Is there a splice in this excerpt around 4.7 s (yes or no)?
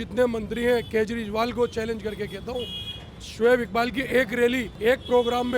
yes